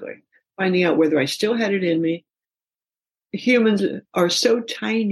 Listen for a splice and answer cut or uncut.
cut